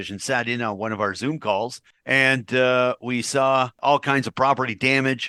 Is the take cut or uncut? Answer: uncut